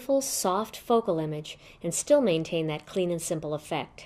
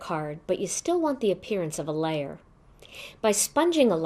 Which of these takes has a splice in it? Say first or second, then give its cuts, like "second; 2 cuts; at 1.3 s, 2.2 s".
second; 1 cut; at 2.8 s